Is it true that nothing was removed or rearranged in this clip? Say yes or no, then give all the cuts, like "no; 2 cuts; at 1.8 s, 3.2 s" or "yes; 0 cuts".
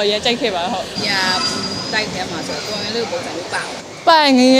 no; 1 cut; at 0.9 s